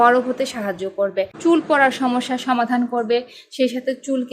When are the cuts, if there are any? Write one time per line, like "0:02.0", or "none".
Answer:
0:01.3